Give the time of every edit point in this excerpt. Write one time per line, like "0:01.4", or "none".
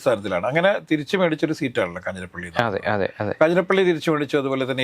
none

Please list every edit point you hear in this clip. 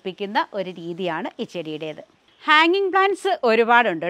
none

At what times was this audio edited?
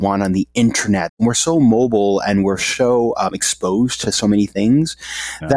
0:01.1

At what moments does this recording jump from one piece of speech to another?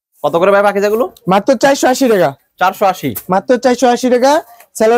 none

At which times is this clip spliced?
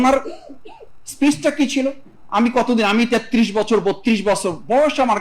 0:02.1

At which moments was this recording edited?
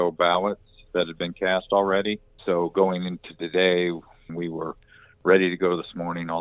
0:02.3
0:04.3

